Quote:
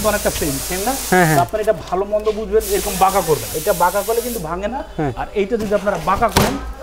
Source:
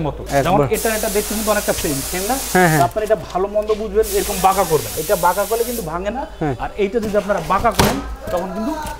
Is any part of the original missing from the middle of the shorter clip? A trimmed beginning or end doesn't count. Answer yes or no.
no